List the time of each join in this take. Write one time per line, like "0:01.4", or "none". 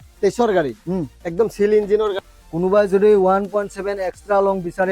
0:02.2